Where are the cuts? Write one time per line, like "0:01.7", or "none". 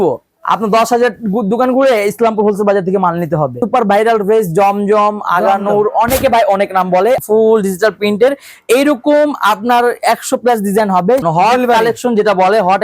0:03.6
0:07.2
0:11.2